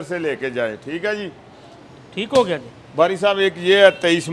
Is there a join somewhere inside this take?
no; 0 cuts

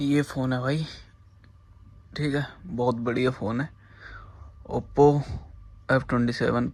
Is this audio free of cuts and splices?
yes; 0 cuts

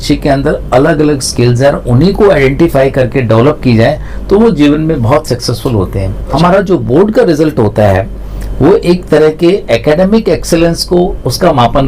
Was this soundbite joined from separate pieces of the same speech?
yes; 1 cut; at 6.3 s

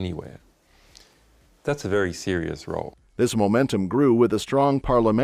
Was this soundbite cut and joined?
no; 0 cuts

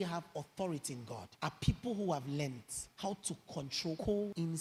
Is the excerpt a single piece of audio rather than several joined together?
yes; 0 cuts

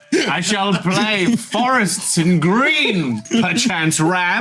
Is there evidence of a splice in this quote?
yes; 1 cut; at 3.2 s

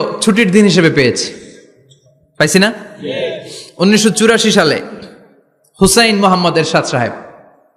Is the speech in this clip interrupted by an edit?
no; 0 cuts

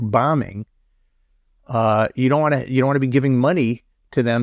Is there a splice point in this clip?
no; 0 cuts

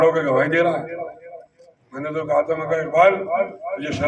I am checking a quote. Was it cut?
no; 0 cuts

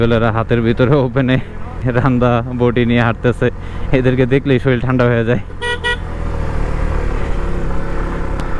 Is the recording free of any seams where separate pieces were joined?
yes; 0 cuts

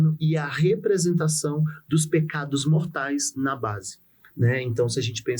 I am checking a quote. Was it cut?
no; 0 cuts

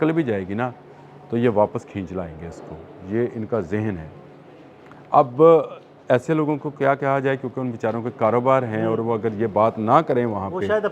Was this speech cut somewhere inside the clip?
no; 0 cuts

